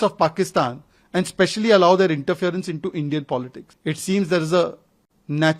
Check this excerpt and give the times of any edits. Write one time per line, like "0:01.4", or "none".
0:03.6